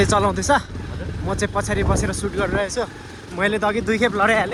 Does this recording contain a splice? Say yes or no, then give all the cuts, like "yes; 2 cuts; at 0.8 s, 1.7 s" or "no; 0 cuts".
no; 0 cuts